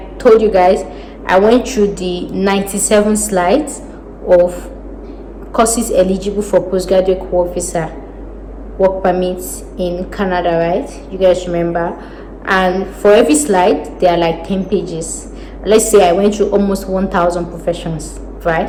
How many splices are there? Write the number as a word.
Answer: zero